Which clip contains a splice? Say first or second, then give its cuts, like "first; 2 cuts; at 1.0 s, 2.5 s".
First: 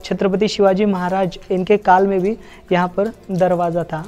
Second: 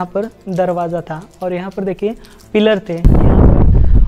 second; 1 cut; at 3.0 s